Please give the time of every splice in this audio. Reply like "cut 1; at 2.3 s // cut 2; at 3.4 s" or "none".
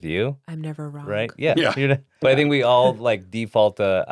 cut 1; at 2.2 s